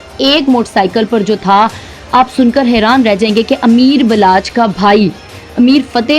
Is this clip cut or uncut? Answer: uncut